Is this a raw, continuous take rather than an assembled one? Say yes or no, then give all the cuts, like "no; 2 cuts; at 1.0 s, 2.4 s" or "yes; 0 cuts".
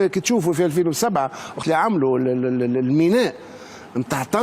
no; 1 cut; at 1.5 s